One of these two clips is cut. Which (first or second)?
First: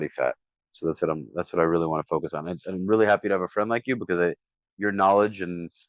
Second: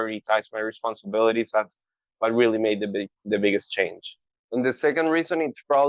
second